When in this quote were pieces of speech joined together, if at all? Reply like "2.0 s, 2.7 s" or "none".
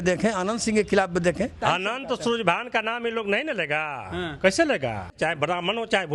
1.6 s, 5.1 s